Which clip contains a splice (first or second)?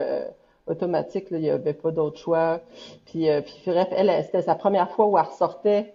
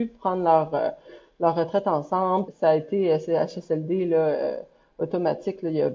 second